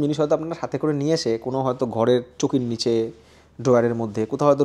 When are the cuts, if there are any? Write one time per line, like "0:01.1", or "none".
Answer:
0:03.2

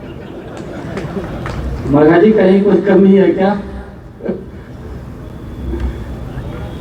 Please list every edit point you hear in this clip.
none

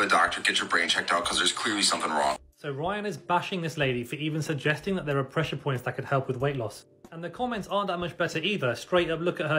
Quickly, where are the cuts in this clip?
0:05.6

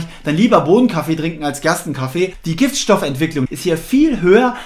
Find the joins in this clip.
0:02.4
0:03.5

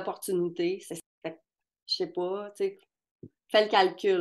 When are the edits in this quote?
0:00.9

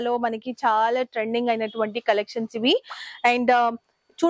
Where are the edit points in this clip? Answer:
none

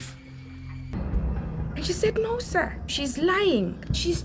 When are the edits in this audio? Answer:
0:00.9

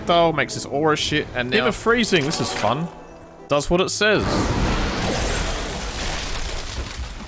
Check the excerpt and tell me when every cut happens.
0:01.4

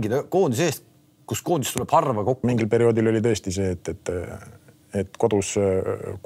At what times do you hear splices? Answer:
0:02.4

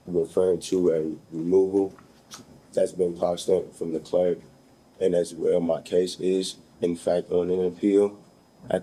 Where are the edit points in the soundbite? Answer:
none

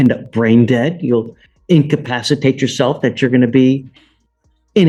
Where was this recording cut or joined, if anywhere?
none

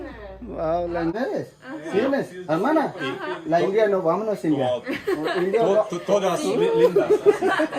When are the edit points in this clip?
0:01.1

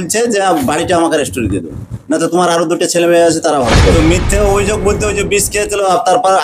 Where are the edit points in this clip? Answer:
0:03.9

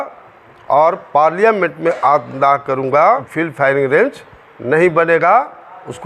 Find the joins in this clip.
0:03.3

